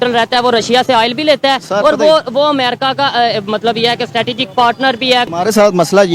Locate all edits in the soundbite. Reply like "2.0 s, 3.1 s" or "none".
5.2 s